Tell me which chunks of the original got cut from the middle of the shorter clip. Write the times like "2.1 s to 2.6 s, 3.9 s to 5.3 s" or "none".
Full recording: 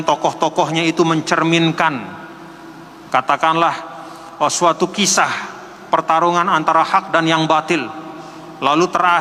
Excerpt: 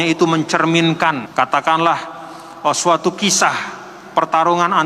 2.0 s to 3.0 s